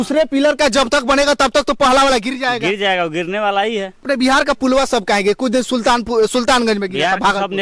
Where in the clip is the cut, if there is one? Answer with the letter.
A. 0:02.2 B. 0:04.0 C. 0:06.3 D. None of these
B